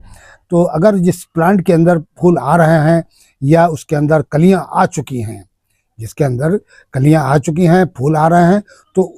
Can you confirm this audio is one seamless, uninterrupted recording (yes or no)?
yes